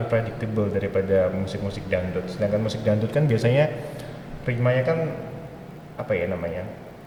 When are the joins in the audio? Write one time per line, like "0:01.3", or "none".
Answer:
none